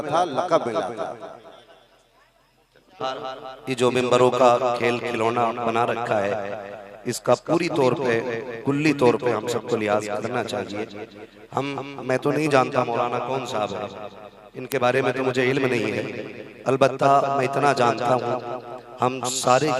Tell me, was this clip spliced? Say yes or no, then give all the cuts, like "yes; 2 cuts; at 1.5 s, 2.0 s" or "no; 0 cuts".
yes; 1 cut; at 3.0 s